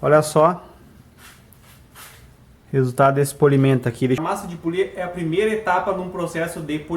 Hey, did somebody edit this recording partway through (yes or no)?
yes